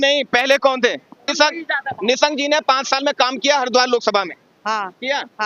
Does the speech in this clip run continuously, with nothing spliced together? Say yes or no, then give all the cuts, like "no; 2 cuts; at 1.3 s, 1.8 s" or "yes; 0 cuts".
no; 1 cut; at 1.2 s